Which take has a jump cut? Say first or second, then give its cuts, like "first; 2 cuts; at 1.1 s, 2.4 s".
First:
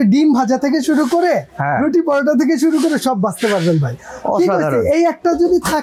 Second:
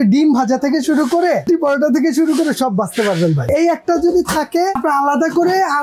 second; 3 cuts; at 1.5 s, 3.5 s, 4.8 s